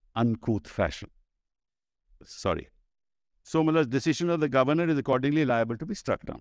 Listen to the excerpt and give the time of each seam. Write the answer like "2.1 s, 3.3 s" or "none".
2.3 s